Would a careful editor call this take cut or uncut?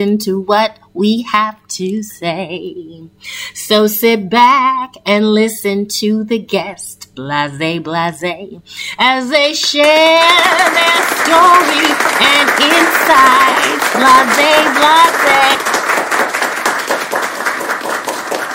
cut